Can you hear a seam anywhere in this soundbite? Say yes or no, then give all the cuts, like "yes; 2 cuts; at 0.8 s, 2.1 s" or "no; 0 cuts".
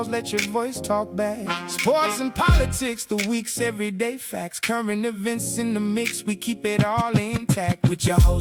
no; 0 cuts